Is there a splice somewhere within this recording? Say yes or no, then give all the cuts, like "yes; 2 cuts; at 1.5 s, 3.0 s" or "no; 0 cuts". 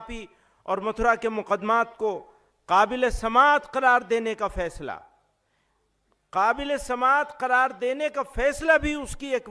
yes; 1 cut; at 3.7 s